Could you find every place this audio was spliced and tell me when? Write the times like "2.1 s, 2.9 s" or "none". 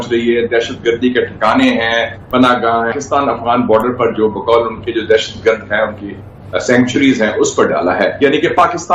2.9 s